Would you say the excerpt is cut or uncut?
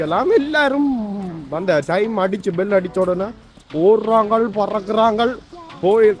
uncut